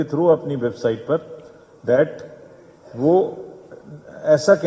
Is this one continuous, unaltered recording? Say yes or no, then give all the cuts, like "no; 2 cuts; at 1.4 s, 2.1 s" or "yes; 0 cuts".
yes; 0 cuts